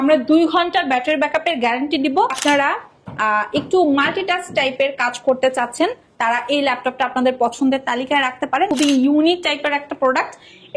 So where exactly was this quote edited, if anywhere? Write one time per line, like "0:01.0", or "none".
0:02.4
0:08.7